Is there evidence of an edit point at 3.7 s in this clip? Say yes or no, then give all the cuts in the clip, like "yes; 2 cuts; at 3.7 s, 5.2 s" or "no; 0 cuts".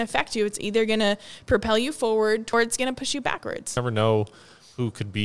yes; 2 cuts; at 2.5 s, 3.7 s